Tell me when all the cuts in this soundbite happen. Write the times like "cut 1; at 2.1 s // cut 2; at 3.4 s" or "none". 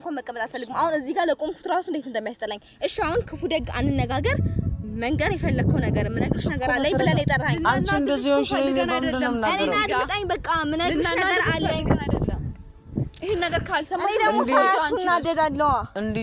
none